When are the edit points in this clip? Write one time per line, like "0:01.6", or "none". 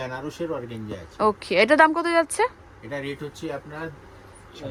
none